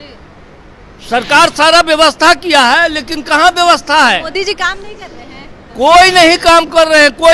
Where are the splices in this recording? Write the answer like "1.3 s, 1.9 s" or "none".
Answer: none